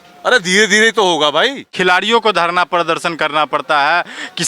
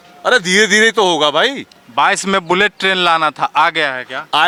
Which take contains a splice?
first; 1 cut; at 1.6 s

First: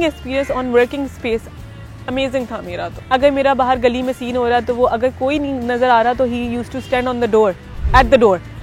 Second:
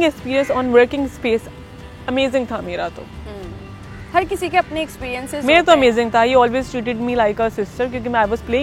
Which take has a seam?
first; 1 cut; at 2.9 s

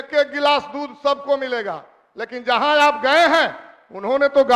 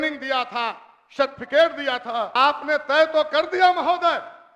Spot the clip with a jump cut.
second; 1 cut; at 2.3 s

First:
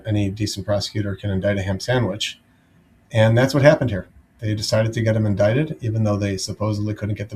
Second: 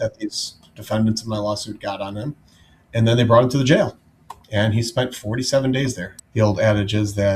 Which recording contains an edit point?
second; 1 cut; at 6.2 s

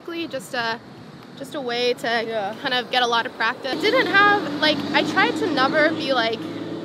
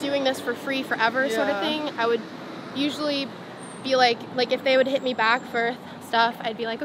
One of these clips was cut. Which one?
first; 1 cut; at 3.7 s

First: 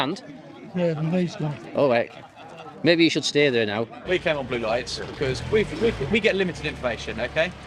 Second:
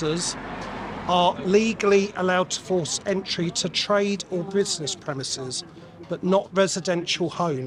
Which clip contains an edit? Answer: first; 1 cut; at 4.1 s

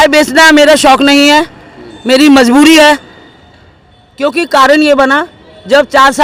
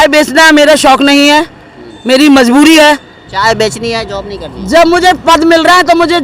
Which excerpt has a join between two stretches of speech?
second; 1 cut; at 3.2 s

